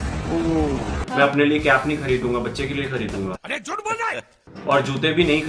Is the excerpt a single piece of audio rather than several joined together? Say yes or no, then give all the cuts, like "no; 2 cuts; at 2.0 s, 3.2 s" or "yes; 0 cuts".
no; 1 cut; at 1.0 s